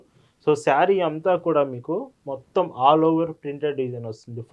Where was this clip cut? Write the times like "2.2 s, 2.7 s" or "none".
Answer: none

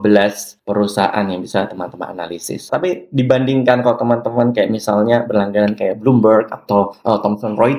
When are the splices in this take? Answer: 2.6 s

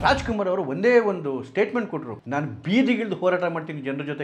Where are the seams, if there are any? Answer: 2.1 s

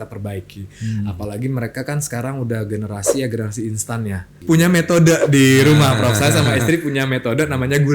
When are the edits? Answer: 4.4 s

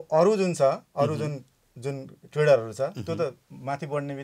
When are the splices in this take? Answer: none

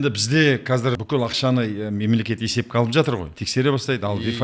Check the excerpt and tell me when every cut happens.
1.0 s, 3.4 s

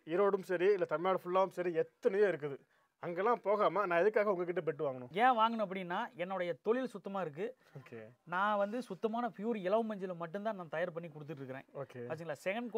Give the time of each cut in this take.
none

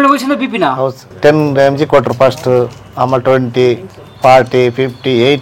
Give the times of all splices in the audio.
1.0 s

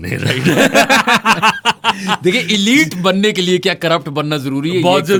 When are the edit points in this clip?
none

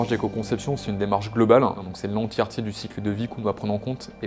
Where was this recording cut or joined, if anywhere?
1.9 s

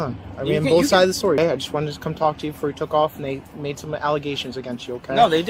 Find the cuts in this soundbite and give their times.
1.4 s

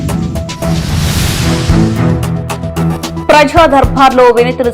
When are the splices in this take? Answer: 3.2 s

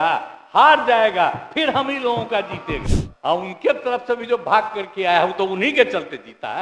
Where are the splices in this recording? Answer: 2.8 s

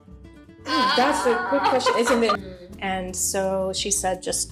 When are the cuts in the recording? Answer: 2.4 s

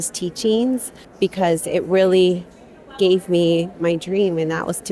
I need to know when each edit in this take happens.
1.0 s

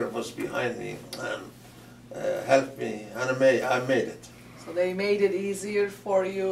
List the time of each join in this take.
1.0 s

